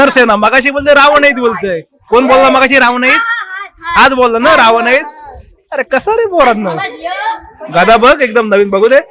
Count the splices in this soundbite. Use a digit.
0